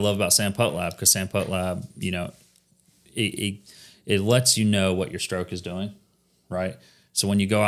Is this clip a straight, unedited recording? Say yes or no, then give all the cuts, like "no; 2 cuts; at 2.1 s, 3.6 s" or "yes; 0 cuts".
yes; 0 cuts